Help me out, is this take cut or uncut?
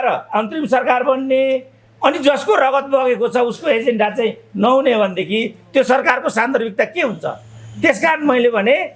uncut